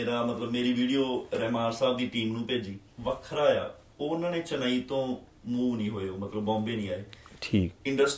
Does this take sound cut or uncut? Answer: cut